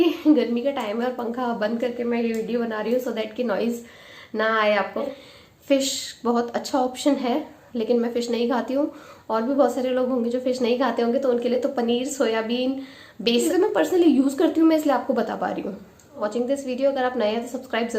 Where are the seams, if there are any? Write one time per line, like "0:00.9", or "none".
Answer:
0:05.1
0:13.4
0:16.2